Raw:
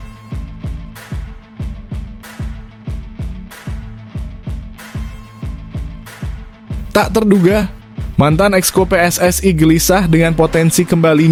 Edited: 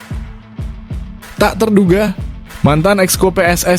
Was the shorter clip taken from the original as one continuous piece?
no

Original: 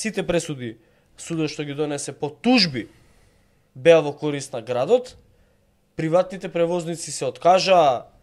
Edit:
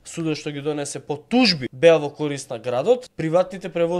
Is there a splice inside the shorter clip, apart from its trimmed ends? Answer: yes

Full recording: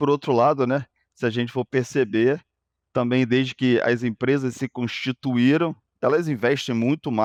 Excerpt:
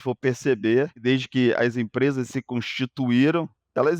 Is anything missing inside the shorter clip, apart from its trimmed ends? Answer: yes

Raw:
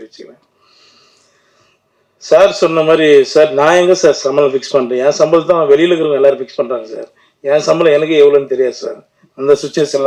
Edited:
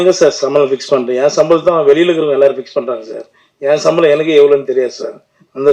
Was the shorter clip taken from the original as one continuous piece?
yes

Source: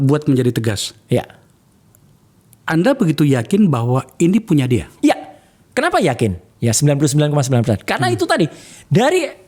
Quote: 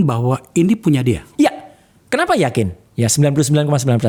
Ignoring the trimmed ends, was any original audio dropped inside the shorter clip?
no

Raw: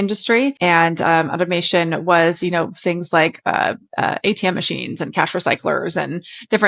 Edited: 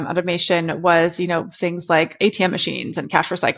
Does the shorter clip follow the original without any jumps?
no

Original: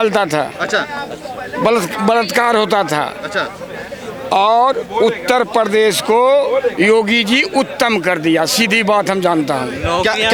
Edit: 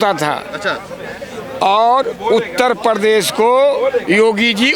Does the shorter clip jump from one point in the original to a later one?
no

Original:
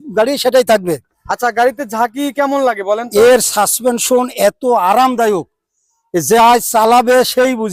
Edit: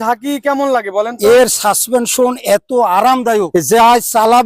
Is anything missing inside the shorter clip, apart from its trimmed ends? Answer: yes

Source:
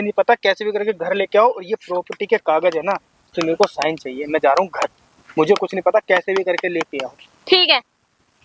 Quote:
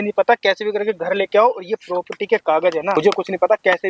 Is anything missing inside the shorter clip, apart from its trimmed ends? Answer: yes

